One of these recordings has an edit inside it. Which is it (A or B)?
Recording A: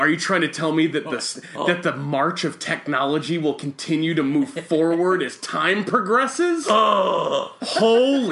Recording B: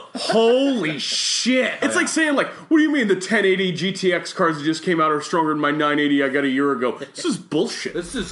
B